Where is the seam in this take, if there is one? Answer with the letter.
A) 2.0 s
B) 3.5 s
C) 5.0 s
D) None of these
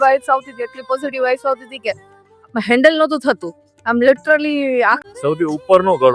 C